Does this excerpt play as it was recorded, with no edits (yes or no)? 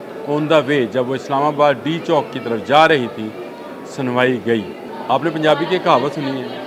no